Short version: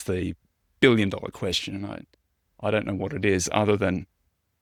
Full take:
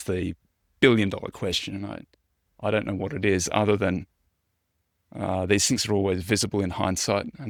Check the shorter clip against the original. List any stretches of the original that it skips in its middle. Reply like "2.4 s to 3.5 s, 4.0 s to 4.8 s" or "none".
none